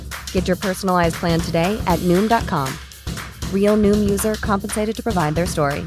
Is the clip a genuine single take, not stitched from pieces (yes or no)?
yes